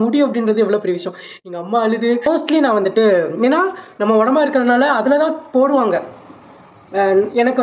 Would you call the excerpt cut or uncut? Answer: cut